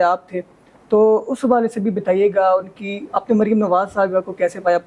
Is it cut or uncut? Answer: uncut